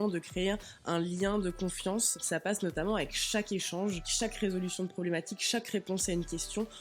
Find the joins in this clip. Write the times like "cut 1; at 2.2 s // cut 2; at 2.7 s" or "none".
cut 1; at 2.2 s // cut 2; at 4.1 s

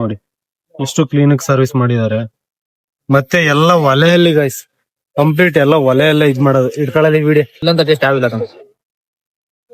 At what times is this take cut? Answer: cut 1; at 7.5 s

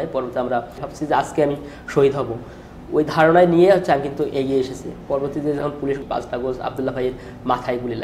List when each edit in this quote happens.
cut 1; at 0.9 s // cut 2; at 6.0 s

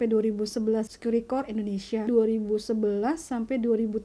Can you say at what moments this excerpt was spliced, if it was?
cut 1; at 0.9 s // cut 2; at 2.1 s

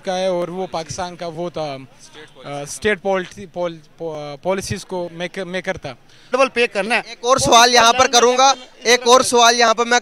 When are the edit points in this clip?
cut 1; at 6.3 s

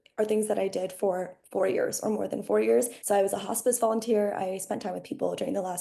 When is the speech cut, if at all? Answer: cut 1; at 3.0 s

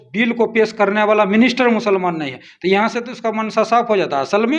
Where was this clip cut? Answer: none

